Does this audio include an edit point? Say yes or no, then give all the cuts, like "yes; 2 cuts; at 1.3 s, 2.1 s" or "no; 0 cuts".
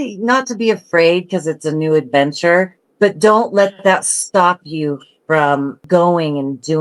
yes; 2 cuts; at 2.8 s, 5.8 s